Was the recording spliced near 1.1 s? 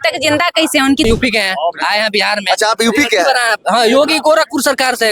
yes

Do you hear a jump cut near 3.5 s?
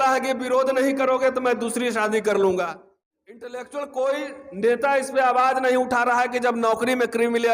yes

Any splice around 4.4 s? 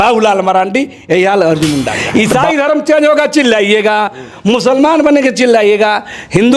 no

